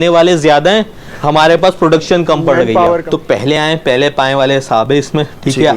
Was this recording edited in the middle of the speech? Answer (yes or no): yes